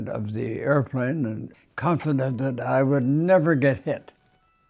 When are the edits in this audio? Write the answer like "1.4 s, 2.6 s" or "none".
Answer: 1.4 s